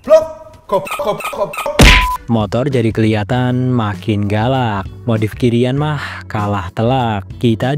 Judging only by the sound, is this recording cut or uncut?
cut